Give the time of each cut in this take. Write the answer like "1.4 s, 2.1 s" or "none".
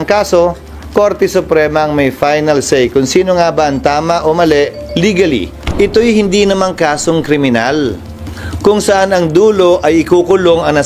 5.6 s